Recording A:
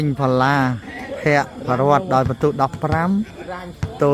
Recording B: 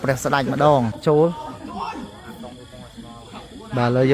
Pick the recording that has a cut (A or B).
B